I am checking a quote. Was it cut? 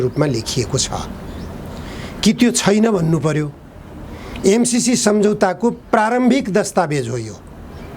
no; 0 cuts

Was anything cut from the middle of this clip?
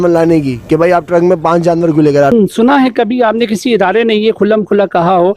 yes; 1 cut; at 2.3 s

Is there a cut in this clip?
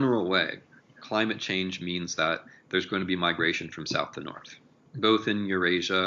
no; 0 cuts

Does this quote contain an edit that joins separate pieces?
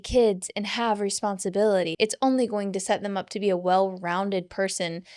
yes; 1 cut; at 1.9 s

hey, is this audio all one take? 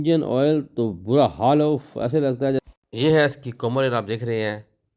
no; 1 cut; at 2.6 s

